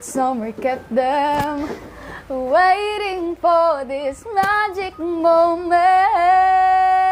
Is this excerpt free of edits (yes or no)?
yes